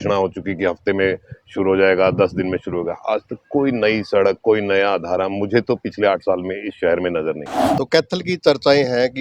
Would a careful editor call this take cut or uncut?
cut